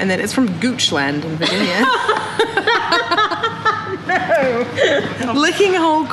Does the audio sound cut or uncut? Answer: uncut